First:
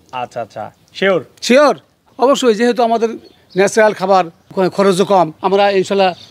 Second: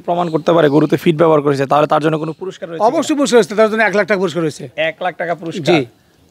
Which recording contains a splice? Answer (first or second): first